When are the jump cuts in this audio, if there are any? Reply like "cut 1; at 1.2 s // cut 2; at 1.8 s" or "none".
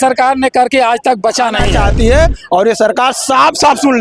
cut 1; at 1.7 s